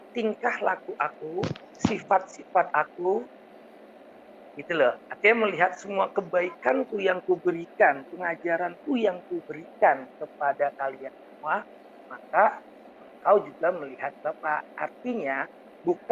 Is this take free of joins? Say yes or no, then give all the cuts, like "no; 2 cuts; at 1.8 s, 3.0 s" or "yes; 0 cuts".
yes; 0 cuts